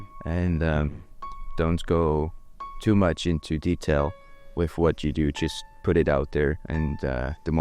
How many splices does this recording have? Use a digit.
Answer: 0